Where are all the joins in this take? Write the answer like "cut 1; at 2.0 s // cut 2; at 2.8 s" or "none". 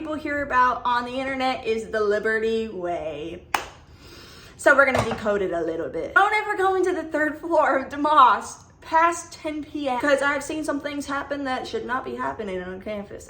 cut 1; at 6.2 s // cut 2; at 10.0 s